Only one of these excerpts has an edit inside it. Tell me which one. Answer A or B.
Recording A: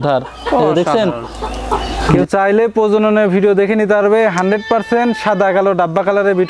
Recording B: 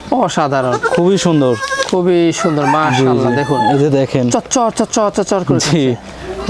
A